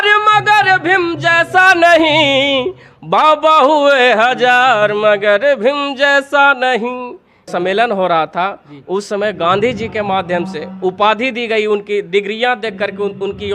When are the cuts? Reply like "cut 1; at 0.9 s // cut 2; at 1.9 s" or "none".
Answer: cut 1; at 7.4 s

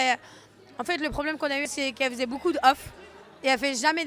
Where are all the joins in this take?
cut 1; at 1.7 s

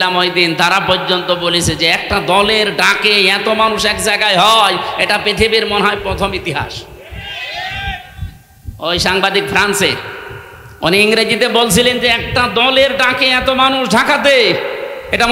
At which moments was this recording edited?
none

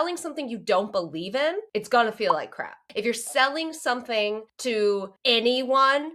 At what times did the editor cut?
cut 1; at 1.6 s // cut 2; at 2.8 s // cut 3; at 4.5 s // cut 4; at 5.1 s

